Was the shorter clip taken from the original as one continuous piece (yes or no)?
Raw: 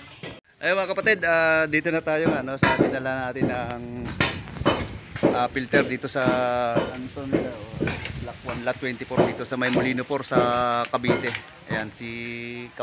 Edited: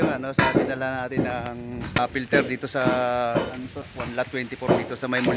no